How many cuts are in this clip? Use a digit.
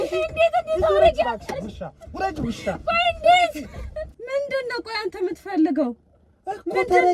1